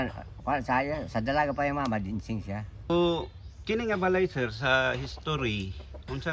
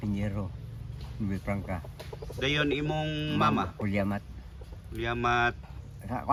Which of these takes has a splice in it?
first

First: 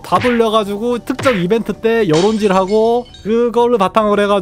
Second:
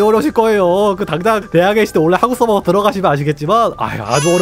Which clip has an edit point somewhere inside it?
second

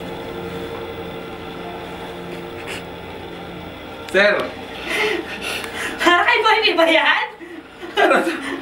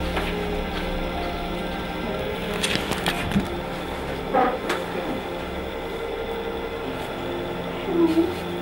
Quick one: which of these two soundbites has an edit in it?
second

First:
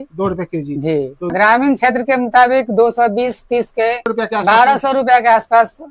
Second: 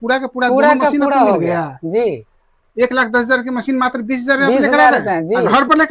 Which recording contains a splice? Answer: first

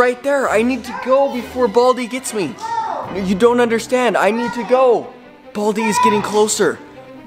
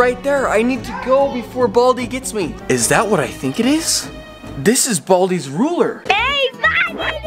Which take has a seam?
second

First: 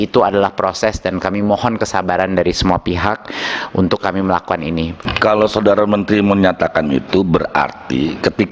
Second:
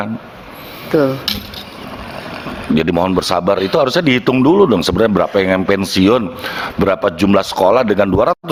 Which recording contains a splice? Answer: first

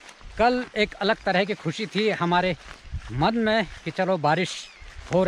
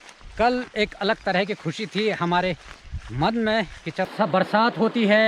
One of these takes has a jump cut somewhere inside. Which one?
second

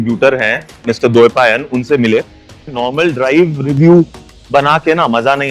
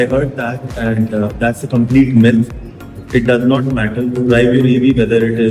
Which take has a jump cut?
first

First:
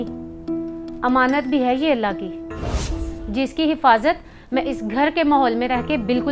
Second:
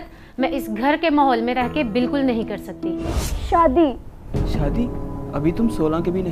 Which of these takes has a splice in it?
second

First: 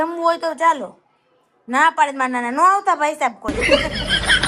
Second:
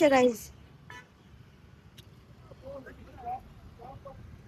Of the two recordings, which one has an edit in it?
first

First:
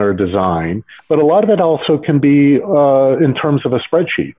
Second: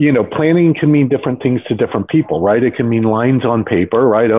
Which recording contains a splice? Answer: first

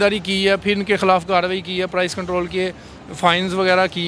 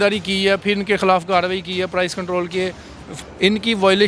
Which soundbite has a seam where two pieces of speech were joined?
second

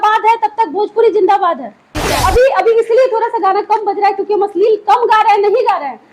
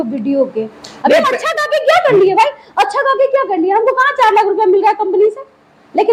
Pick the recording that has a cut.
first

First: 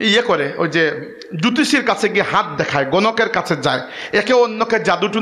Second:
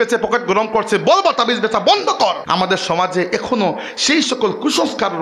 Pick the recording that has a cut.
second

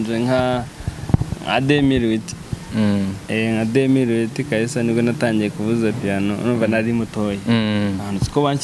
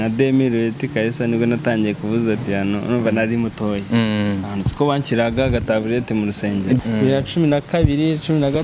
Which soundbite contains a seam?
second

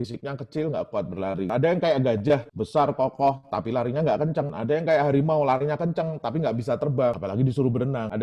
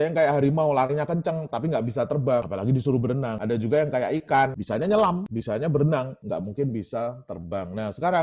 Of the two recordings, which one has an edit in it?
second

